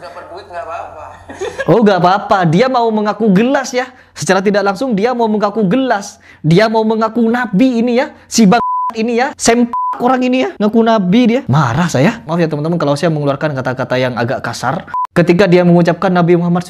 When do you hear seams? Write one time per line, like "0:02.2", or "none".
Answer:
0:11.5
0:15.0